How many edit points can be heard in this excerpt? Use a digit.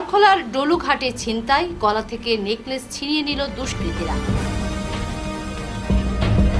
0